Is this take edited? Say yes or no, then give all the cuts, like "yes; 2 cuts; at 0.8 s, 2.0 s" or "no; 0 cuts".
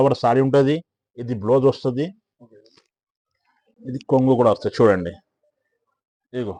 no; 0 cuts